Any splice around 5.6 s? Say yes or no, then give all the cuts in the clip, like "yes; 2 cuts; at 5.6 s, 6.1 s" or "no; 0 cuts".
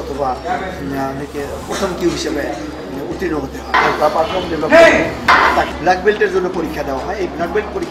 yes; 2 cuts; at 3.7 s, 5.6 s